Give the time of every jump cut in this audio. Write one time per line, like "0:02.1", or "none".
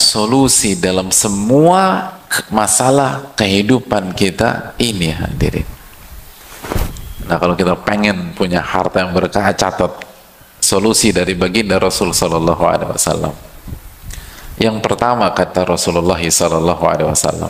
0:06.7